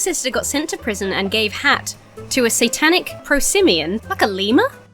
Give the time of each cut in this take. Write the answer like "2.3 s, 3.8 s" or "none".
3.1 s, 4.1 s